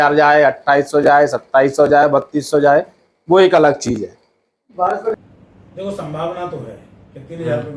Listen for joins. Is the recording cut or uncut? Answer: cut